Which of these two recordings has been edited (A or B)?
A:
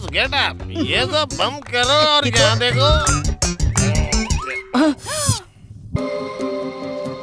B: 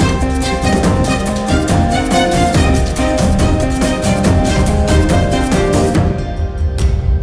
A